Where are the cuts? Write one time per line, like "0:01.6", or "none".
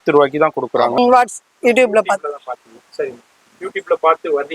0:01.0